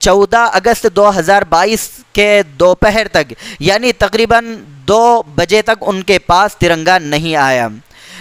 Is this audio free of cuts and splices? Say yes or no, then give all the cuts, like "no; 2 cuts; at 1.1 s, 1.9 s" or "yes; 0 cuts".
yes; 0 cuts